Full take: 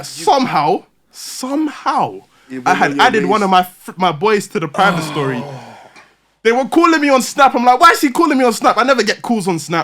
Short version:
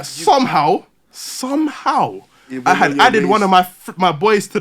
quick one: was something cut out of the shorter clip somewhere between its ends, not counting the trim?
no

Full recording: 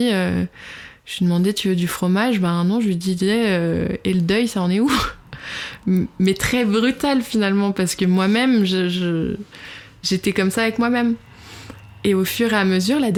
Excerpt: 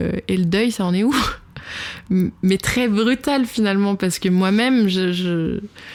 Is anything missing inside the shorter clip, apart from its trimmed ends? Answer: no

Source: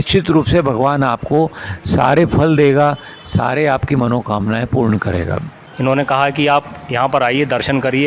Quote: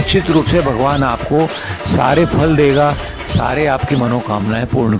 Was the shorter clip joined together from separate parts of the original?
no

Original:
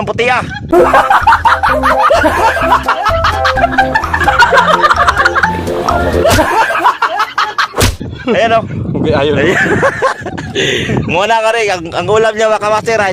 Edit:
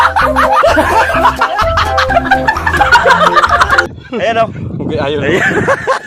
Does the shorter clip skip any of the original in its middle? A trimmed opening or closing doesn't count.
yes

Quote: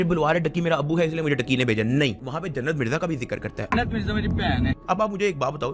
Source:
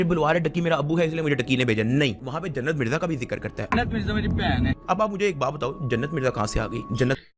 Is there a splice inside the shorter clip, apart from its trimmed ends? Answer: no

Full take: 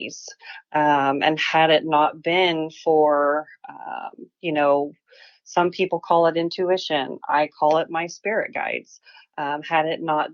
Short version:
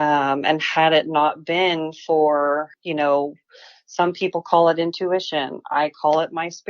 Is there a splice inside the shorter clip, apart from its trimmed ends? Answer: yes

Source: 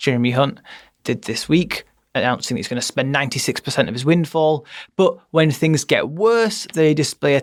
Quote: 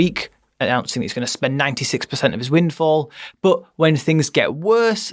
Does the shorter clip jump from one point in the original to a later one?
no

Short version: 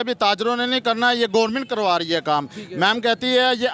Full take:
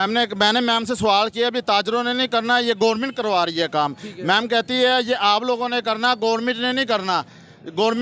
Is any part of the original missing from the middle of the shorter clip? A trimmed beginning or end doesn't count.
no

